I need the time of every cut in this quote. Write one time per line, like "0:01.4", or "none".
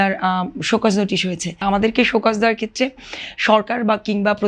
0:01.5